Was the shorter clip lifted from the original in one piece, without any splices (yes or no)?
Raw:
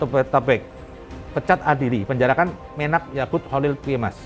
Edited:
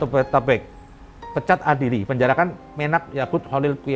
yes